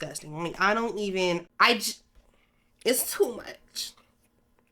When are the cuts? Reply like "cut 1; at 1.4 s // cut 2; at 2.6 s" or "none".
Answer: cut 1; at 1.4 s